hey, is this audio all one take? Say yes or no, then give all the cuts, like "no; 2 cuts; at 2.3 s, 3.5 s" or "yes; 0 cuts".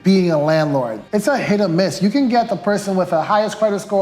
no; 1 cut; at 1.0 s